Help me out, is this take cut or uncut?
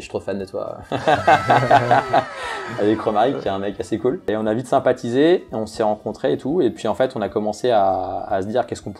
uncut